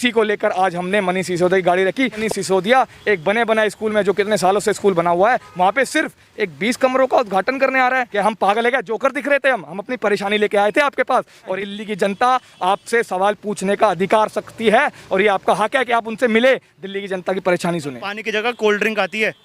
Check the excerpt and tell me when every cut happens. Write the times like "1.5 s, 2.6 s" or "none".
2.2 s, 8.1 s, 11.5 s, 18.1 s

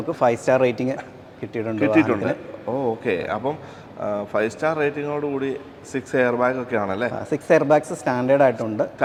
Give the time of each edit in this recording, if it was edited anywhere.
none

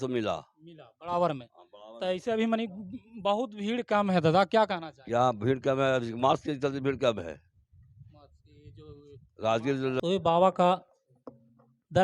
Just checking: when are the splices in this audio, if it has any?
10.0 s

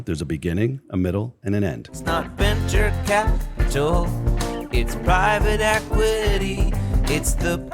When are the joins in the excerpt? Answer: 1.9 s

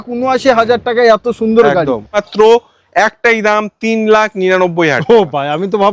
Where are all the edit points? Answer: 2.2 s

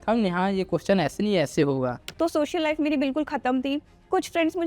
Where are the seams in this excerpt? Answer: 2.0 s

